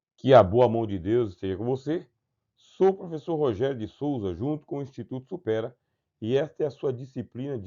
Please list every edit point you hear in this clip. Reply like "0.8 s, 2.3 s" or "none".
0.9 s